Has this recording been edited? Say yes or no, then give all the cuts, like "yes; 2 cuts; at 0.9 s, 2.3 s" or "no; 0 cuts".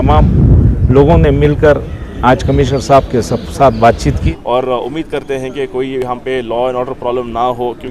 yes; 1 cut; at 4.2 s